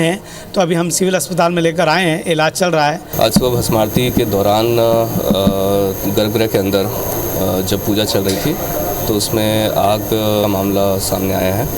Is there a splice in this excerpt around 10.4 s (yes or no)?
yes